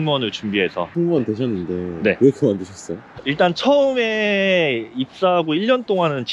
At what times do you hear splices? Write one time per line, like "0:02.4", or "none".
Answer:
0:00.9
0:03.1

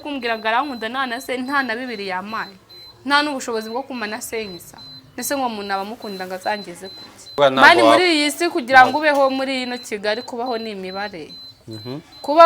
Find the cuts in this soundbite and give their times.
0:07.4

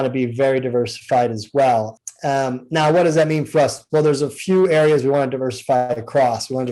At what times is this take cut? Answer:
0:02.0

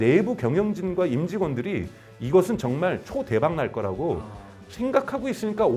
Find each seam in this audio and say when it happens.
none

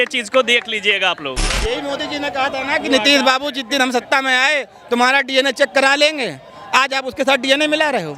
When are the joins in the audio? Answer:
0:01.4

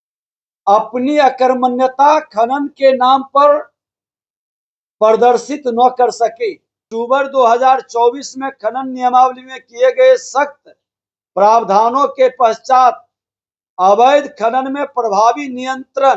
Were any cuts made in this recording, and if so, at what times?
0:06.9

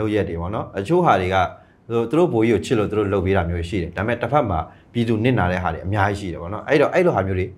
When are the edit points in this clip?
none

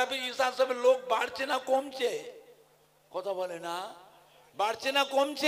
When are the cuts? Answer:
none

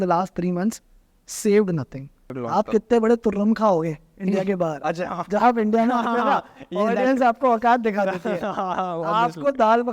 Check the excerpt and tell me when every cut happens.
0:02.3

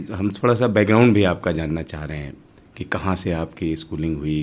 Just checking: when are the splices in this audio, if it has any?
none

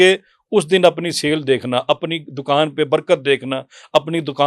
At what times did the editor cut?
none

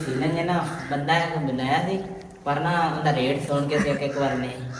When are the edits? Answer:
none

